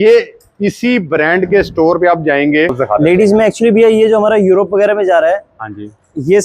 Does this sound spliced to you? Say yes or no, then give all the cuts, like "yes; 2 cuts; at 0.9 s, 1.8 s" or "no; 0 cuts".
yes; 1 cut; at 2.8 s